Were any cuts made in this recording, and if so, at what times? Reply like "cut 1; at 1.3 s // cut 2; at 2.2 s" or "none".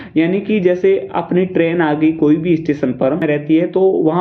cut 1; at 3.2 s